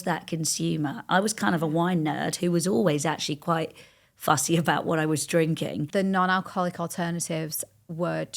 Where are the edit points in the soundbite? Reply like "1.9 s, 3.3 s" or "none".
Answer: 5.8 s